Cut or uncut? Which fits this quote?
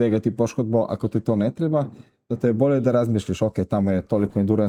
uncut